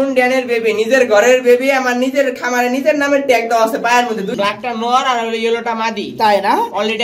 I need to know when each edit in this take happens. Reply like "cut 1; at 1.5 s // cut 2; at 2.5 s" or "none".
cut 1; at 4.3 s